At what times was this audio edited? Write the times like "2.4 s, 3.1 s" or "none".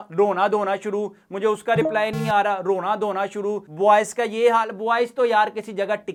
none